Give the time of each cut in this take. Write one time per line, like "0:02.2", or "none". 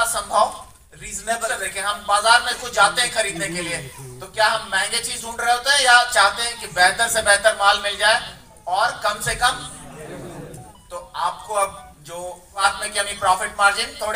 0:01.5
0:12.7